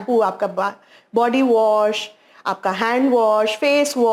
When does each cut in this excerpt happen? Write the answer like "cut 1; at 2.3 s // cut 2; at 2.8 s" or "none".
none